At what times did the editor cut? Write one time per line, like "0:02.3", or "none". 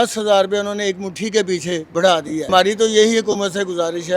0:02.5